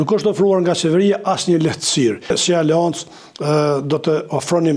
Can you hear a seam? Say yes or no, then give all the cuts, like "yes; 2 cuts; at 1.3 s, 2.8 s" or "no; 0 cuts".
yes; 1 cut; at 2.3 s